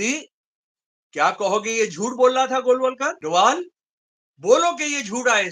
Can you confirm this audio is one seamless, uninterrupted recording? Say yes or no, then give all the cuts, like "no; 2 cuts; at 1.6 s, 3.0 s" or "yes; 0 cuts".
no; 1 cut; at 3.2 s